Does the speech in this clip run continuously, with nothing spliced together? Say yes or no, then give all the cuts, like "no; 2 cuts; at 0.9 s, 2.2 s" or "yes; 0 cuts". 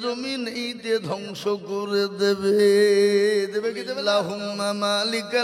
no; 1 cut; at 3.7 s